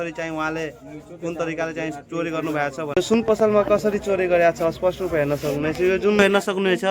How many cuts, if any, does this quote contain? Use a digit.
2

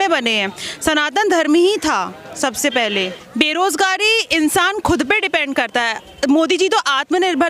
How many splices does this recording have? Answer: 1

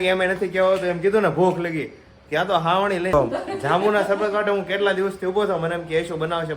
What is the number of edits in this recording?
1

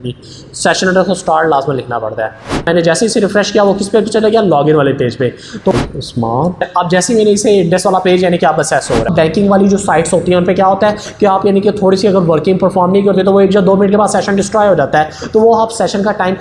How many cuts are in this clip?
3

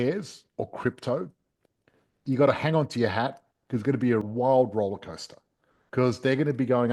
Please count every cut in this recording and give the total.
1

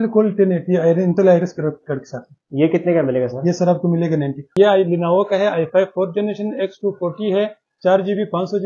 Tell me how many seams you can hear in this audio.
1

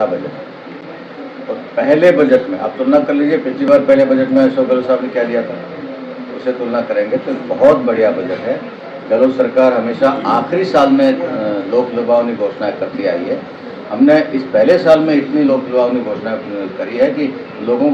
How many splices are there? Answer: 0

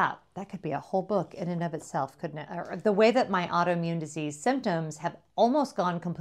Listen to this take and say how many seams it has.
1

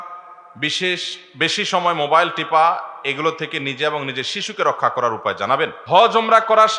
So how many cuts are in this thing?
1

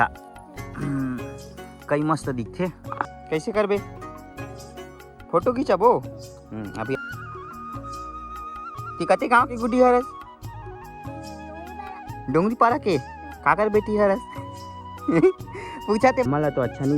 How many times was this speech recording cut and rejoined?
3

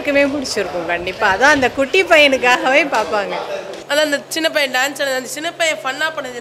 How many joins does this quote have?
1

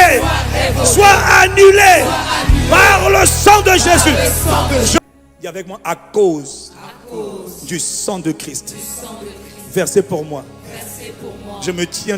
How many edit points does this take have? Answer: 1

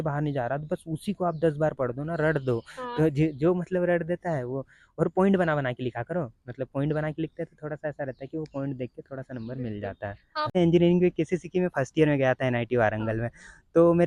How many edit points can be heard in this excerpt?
1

